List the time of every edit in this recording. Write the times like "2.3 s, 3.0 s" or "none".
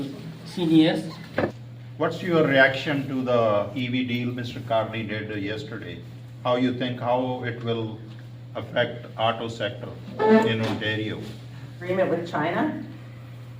1.6 s, 11.9 s

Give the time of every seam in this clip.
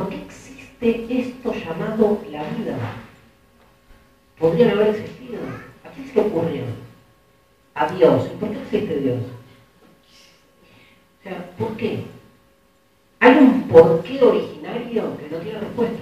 8.3 s

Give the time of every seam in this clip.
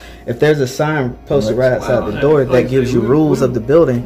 none

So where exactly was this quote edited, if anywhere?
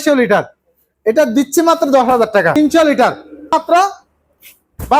2.5 s, 3.5 s

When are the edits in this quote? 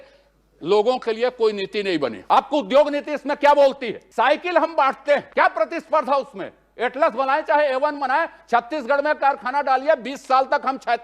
2.2 s, 4.0 s, 5.3 s

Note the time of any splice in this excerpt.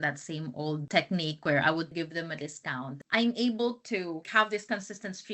1.9 s, 2.9 s, 4.3 s

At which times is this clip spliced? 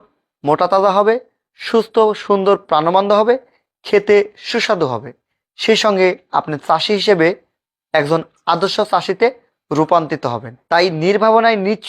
10.5 s

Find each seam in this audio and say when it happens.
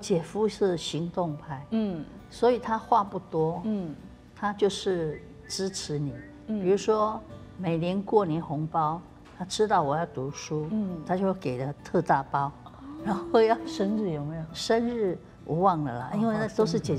none

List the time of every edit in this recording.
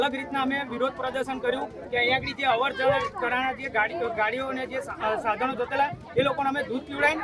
none

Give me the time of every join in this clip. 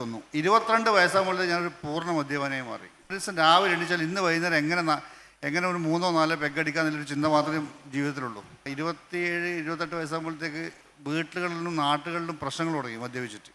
3.2 s, 8.6 s

